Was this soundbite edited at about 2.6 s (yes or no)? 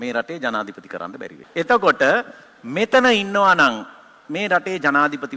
no